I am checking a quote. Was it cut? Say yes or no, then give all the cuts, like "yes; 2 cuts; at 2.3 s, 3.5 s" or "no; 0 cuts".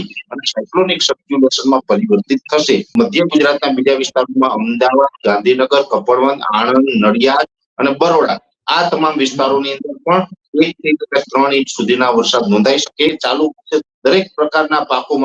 yes; 2 cuts; at 2.9 s, 13.2 s